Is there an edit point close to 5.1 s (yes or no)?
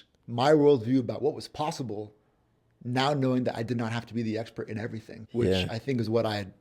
yes